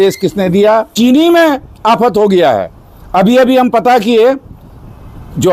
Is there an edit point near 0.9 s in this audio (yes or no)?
yes